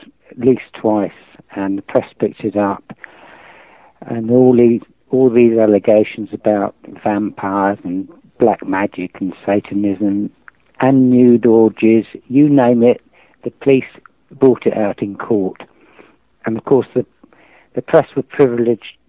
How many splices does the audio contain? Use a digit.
1